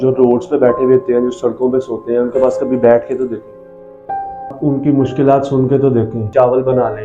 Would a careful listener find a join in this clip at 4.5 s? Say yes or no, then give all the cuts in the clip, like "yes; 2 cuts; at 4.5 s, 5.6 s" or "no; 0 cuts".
yes; 2 cuts; at 4.5 s, 6.3 s